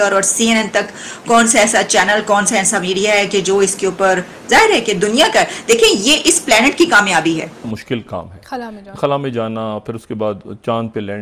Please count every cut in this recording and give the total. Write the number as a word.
one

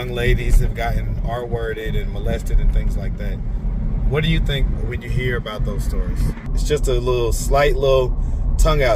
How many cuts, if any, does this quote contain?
one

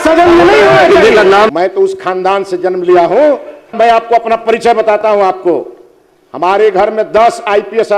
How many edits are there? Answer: two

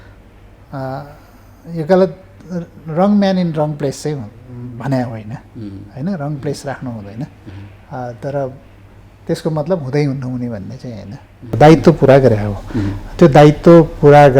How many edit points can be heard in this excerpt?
one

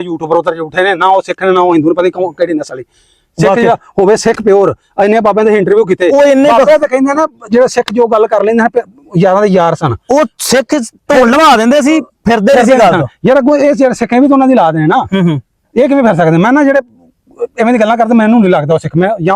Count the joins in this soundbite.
zero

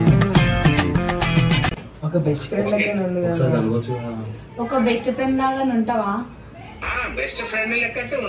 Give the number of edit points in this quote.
one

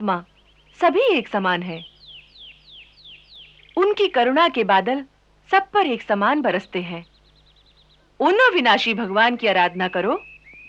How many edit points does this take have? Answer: zero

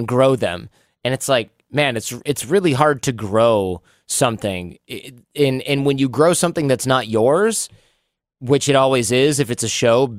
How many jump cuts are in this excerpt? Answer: zero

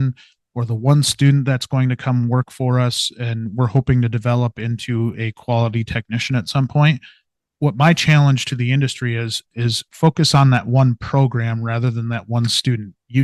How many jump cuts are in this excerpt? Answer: zero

